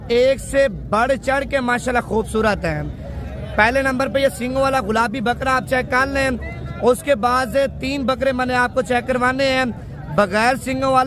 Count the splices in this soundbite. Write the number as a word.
zero